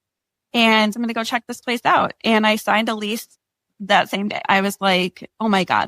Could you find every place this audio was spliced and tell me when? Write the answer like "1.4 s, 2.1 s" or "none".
0.9 s, 4.4 s